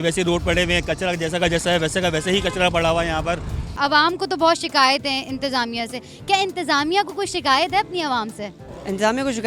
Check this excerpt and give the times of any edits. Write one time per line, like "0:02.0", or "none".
0:03.6